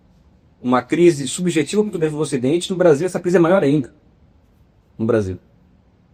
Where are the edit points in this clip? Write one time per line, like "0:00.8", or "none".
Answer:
none